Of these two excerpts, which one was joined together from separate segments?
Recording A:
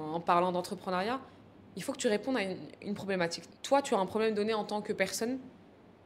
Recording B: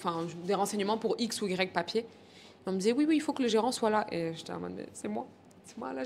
A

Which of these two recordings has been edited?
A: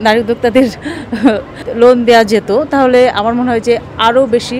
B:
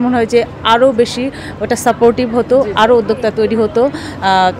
A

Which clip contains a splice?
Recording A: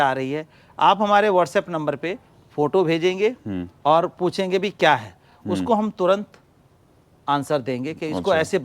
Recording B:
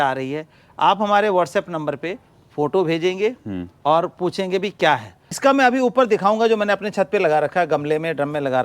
B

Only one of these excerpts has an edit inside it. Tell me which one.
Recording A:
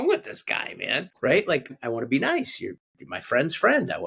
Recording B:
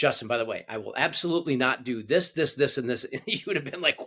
A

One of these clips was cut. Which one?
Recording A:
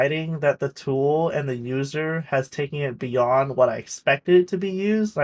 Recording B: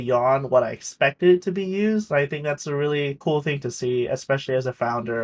B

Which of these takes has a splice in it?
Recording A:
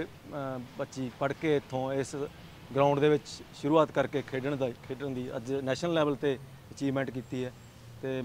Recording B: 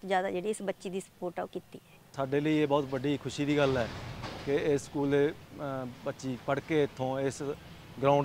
B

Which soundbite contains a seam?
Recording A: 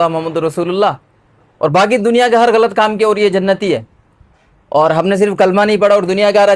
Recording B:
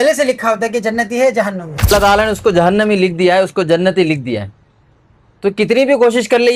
B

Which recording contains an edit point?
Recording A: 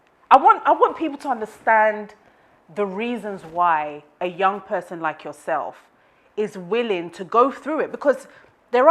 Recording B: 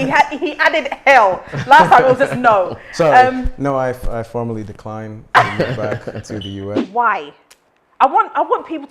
B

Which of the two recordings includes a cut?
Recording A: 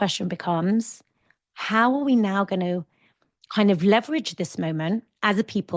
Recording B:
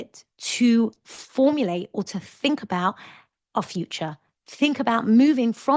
A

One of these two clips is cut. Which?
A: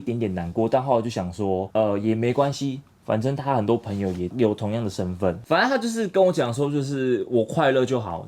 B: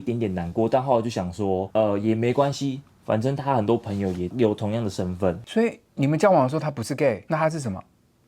B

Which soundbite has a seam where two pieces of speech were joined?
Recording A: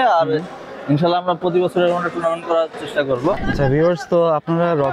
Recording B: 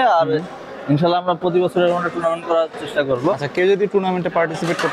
A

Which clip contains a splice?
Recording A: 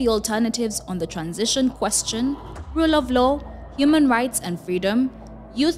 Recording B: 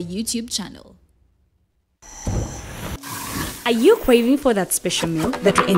B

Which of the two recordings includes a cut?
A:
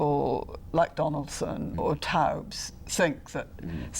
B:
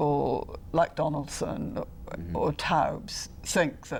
A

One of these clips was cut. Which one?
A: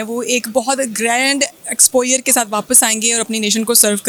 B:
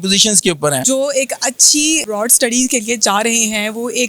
B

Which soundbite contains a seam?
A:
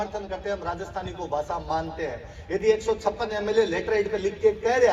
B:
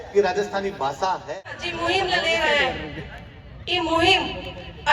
B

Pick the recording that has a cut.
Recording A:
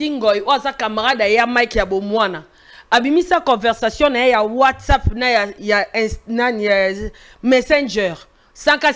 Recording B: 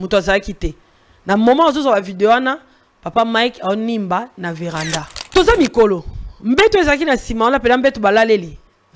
B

